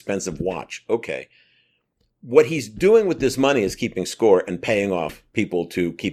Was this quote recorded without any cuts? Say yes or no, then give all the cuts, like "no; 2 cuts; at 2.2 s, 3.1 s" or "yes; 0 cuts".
no; 1 cut; at 5.2 s